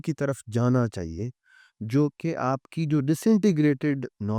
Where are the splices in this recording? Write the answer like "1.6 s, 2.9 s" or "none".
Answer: none